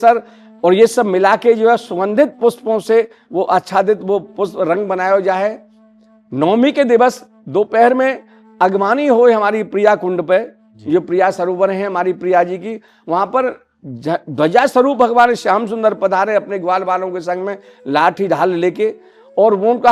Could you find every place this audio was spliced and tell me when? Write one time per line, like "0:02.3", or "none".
none